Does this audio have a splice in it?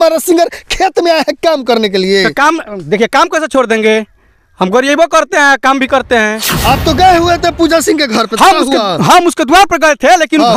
yes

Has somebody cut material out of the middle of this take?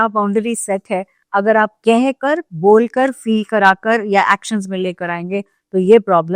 no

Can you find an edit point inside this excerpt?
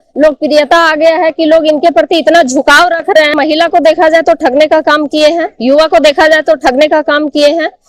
yes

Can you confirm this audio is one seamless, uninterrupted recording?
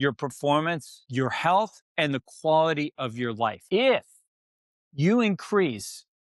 no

